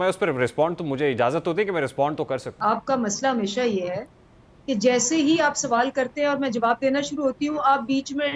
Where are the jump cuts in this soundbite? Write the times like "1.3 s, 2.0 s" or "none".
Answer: 2.5 s

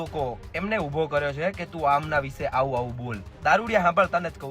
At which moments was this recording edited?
3.3 s

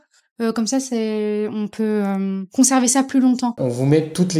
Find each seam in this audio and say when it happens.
2.4 s, 3.6 s

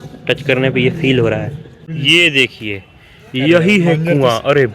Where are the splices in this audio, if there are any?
1.9 s

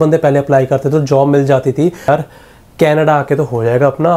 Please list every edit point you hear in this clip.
2.1 s

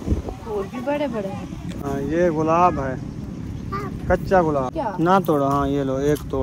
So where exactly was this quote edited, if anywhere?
4.7 s

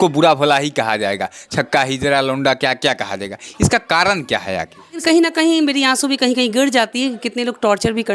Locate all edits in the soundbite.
5.0 s

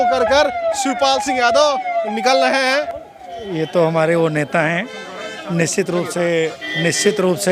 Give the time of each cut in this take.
2.9 s

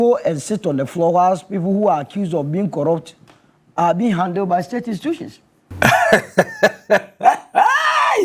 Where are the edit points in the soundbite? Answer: 5.6 s

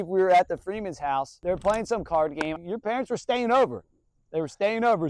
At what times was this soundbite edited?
1.4 s, 2.6 s

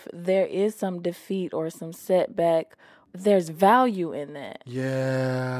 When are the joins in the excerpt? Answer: none

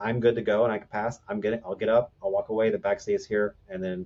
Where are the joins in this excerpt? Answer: none

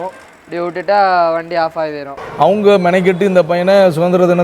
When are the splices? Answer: 2.2 s

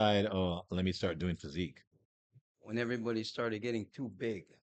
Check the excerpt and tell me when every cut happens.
none

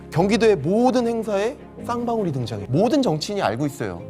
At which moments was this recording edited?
2.6 s

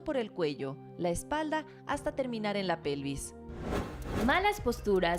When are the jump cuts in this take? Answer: 3.8 s

